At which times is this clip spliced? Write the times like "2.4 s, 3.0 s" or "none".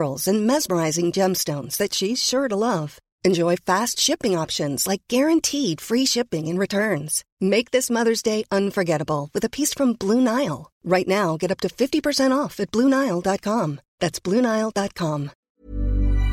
15.4 s